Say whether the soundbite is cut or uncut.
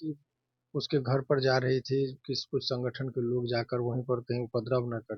uncut